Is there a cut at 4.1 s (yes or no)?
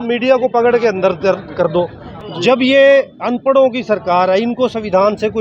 no